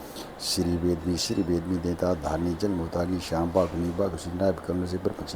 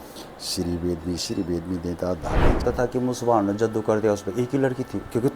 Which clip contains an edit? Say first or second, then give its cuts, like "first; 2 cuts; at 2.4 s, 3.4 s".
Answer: second; 1 cut; at 2.6 s